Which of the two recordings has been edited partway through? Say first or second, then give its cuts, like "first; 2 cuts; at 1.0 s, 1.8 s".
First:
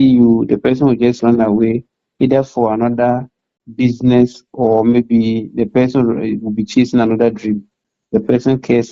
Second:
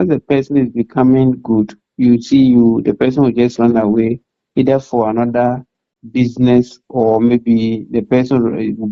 first; 1 cut; at 7.9 s